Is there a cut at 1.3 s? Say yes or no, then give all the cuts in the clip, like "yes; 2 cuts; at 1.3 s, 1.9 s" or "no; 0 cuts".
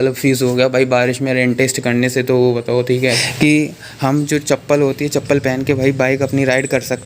no; 1 cut; at 3.0 s